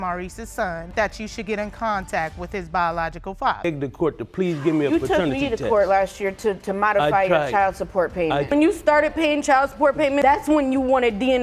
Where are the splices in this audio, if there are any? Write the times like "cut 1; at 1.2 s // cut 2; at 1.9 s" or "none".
cut 1; at 0.9 s // cut 2; at 3.6 s // cut 3; at 8.5 s

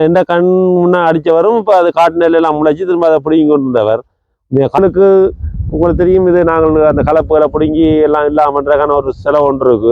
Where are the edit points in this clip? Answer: cut 1; at 4.8 s

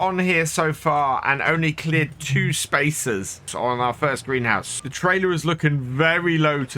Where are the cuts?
cut 1; at 3.5 s // cut 2; at 4.7 s

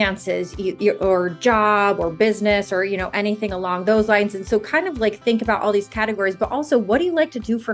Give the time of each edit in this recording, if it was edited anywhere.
none

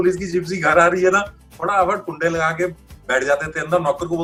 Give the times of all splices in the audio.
none

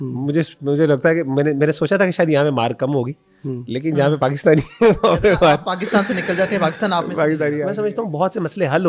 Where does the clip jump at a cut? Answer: cut 1; at 7.7 s

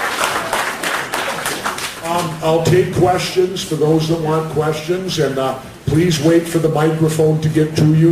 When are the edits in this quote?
none

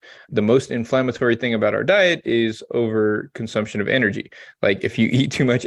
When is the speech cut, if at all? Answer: none

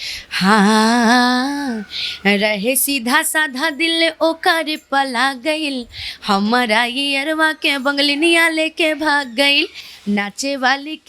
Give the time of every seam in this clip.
none

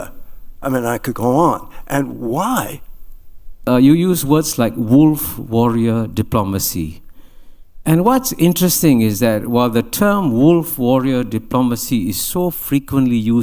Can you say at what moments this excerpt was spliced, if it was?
cut 1; at 3.7 s

